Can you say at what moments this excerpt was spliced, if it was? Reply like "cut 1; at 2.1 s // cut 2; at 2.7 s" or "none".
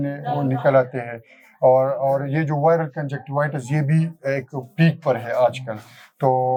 none